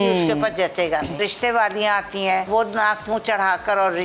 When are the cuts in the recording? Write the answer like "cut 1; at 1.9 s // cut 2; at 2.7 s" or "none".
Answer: cut 1; at 1.2 s // cut 2; at 2.5 s